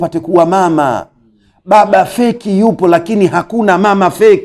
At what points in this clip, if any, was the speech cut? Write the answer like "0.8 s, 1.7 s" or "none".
none

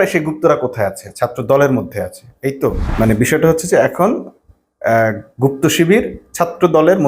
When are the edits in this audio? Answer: 2.8 s

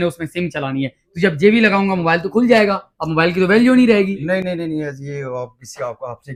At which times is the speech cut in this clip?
none

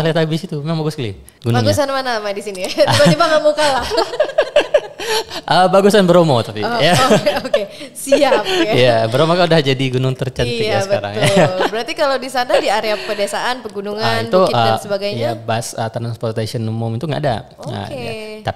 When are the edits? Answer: none

